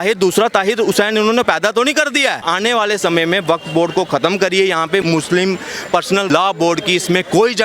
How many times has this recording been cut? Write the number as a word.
three